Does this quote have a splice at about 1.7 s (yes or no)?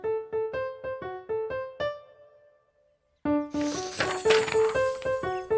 yes